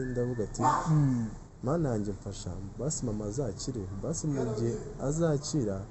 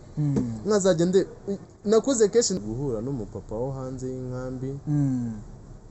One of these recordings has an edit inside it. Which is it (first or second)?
second